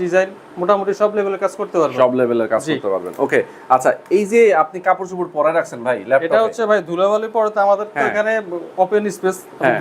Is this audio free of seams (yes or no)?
yes